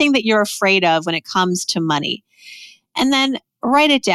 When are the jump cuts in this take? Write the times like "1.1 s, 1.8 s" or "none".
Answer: none